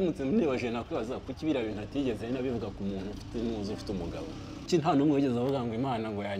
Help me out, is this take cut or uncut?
cut